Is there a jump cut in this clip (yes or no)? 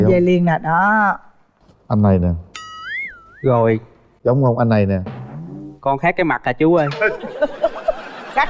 no